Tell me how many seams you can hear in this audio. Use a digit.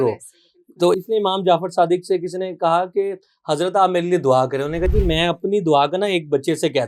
1